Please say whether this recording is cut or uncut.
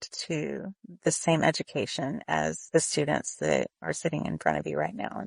cut